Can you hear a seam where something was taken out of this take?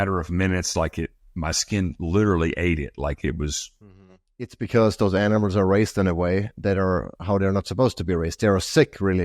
yes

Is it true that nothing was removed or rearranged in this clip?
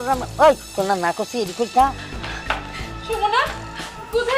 no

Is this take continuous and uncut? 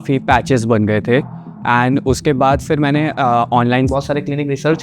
no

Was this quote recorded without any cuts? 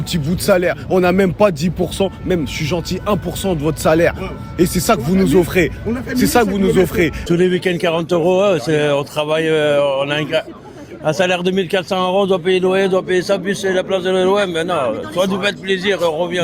yes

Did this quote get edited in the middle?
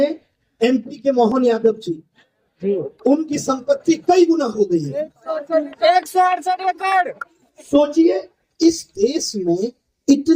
no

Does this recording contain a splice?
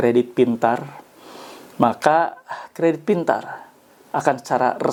no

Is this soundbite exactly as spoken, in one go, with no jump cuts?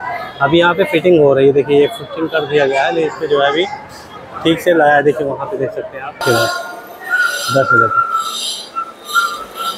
no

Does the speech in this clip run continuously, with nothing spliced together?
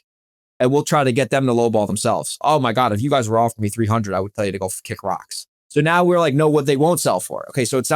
no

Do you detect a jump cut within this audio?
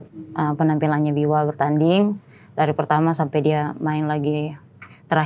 no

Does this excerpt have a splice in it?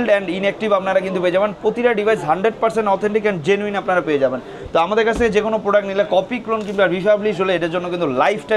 no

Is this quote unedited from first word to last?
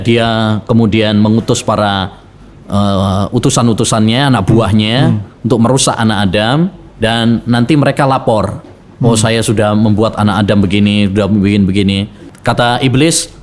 no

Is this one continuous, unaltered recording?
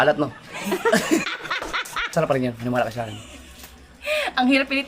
no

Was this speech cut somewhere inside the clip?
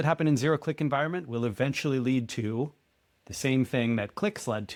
no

